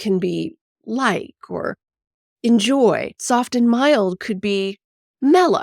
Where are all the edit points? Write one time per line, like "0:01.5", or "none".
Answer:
0:03.1

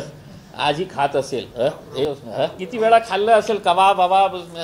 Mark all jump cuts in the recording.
0:02.0

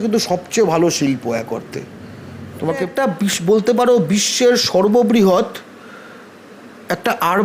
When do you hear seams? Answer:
0:02.9

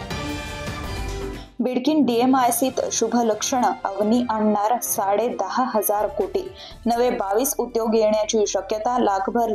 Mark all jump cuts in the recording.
0:01.1

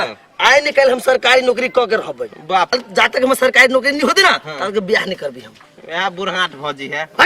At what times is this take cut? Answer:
0:02.7

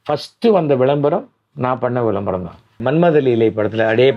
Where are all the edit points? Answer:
0:02.8

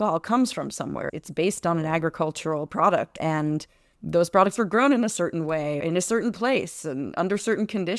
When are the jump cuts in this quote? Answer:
0:03.1
0:05.8

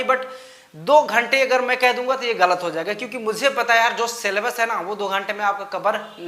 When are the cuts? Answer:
none

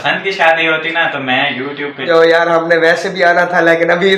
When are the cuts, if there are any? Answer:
0:02.1

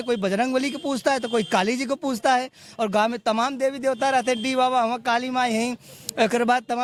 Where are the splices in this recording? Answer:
none

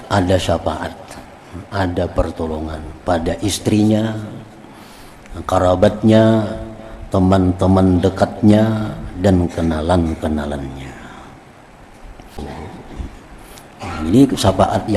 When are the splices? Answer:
0:12.4

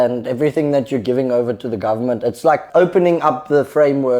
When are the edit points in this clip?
0:02.6

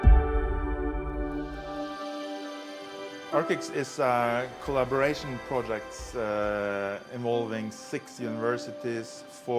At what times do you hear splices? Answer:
0:01.5

